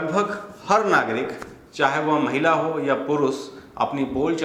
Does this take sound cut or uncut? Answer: uncut